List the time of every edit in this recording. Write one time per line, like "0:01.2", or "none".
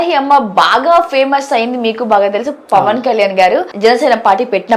0:03.7